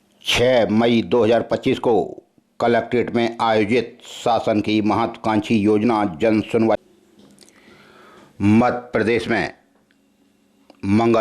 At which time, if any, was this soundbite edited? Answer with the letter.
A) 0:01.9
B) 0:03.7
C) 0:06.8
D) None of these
C